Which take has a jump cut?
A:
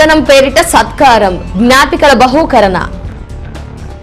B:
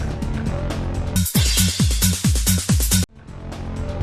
A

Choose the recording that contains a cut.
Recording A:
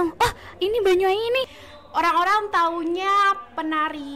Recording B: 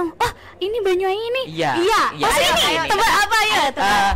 A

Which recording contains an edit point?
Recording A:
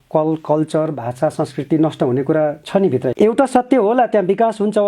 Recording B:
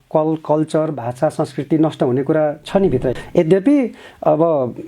B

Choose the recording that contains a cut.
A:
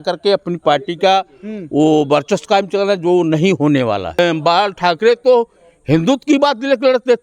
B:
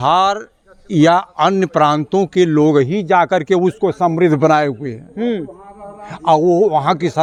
A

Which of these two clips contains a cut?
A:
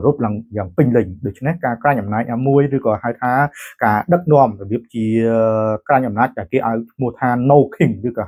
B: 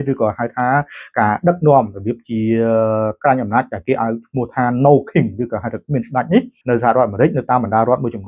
B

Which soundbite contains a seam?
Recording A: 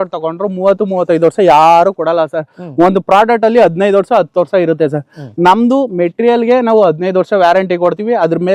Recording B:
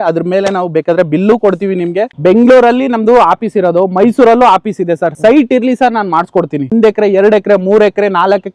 B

